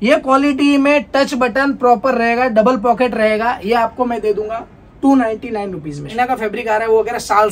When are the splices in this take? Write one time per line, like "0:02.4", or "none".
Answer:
0:06.1

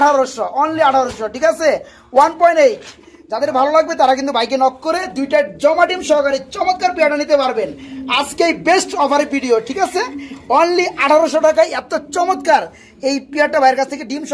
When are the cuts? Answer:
none

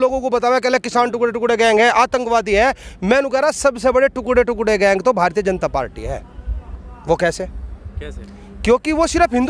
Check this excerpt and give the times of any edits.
none

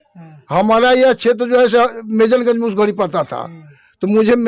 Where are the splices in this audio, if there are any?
none

